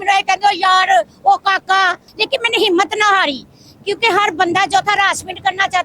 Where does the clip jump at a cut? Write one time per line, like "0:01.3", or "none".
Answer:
0:02.0